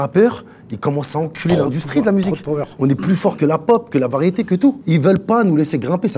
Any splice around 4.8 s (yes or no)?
yes